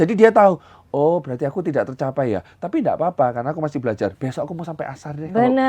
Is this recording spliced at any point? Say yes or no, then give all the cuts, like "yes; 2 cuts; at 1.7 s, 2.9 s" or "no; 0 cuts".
no; 0 cuts